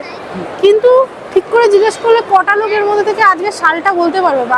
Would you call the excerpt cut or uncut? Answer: uncut